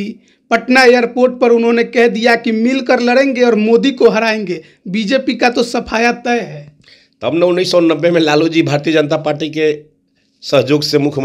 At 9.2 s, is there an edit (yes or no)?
no